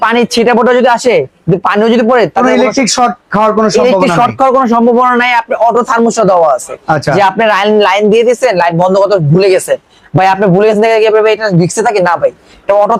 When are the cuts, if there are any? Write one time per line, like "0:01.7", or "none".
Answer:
none